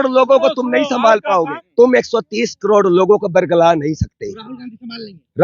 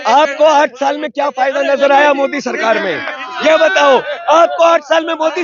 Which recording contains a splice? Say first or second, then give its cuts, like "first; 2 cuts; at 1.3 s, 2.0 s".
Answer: first; 1 cut; at 1.6 s